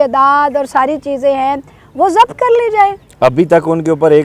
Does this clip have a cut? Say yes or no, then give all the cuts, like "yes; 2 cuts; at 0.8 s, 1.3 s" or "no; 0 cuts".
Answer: no; 0 cuts